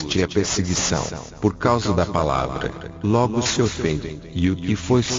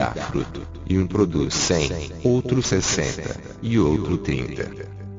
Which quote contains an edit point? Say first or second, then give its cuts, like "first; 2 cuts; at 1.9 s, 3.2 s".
first; 1 cut; at 4.2 s